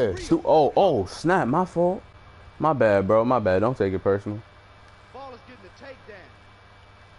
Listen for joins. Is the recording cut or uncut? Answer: uncut